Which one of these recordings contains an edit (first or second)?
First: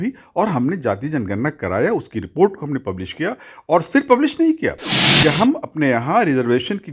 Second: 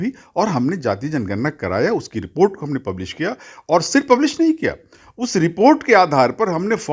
first